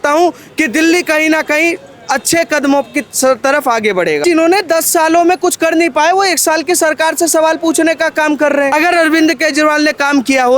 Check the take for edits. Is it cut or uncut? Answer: cut